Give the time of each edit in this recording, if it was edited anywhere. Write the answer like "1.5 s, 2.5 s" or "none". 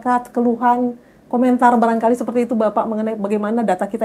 none